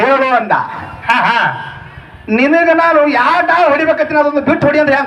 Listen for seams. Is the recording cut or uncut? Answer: uncut